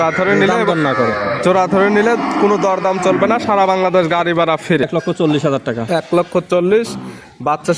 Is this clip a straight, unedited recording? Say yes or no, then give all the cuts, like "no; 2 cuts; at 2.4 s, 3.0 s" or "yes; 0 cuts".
no; 1 cut; at 4.8 s